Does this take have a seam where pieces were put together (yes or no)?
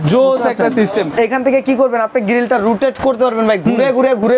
yes